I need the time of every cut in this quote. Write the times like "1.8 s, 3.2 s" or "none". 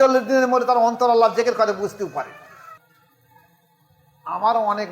2.8 s